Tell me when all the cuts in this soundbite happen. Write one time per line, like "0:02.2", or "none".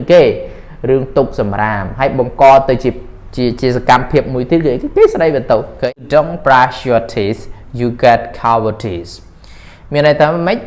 0:05.9